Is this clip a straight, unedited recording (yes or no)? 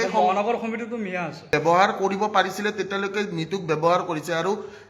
no